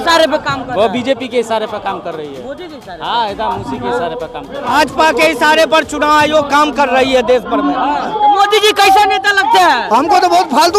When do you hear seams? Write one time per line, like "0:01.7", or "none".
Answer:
0:04.7
0:08.1